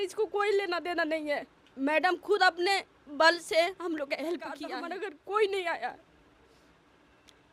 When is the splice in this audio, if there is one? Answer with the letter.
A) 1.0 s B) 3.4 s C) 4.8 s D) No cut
C